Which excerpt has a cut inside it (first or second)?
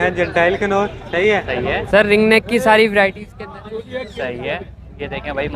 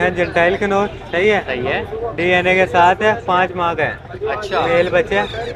first